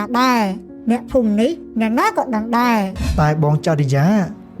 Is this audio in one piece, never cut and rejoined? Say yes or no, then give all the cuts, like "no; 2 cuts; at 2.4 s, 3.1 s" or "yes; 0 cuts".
no; 1 cut; at 3.0 s